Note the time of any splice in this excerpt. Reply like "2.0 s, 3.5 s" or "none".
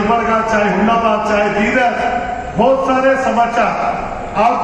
none